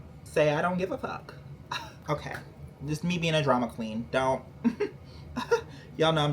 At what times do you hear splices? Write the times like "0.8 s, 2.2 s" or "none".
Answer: 2.0 s